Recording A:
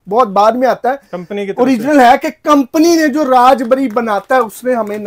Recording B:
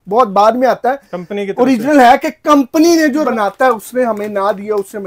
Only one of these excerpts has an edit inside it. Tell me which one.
B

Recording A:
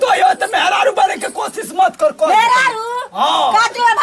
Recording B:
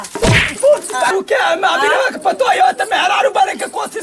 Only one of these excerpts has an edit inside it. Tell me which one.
B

